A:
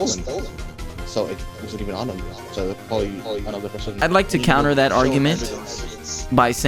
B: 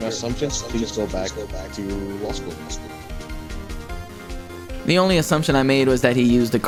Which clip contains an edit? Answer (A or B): A